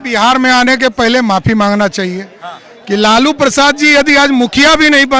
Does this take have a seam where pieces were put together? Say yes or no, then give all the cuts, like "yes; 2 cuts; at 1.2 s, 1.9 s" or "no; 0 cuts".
no; 0 cuts